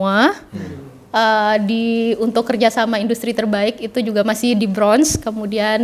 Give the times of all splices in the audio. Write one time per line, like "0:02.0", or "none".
none